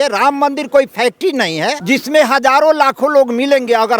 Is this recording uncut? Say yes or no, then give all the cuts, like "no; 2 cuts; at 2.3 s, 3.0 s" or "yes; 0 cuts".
no; 1 cut; at 1.8 s